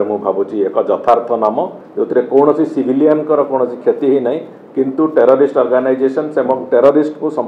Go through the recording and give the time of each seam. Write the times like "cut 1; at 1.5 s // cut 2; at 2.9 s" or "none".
cut 1; at 1.8 s